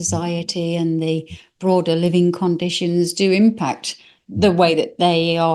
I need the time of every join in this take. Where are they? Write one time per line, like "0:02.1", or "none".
none